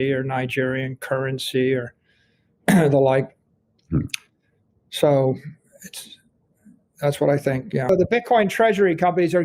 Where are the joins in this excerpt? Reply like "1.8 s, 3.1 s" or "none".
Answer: 7.9 s